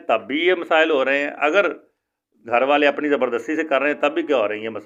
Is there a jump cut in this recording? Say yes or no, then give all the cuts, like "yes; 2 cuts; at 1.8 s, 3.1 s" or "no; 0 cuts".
no; 0 cuts